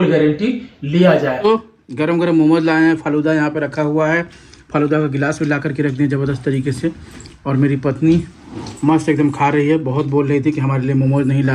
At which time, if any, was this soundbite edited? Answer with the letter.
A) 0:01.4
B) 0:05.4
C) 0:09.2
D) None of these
A